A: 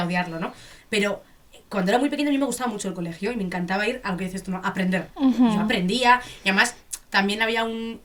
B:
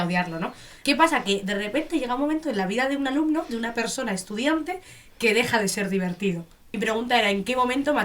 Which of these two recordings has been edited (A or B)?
B